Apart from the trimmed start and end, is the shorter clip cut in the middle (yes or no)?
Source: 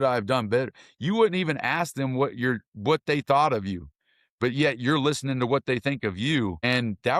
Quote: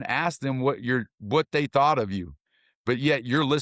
no